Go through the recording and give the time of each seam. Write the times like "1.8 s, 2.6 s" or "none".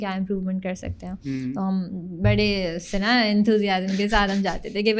none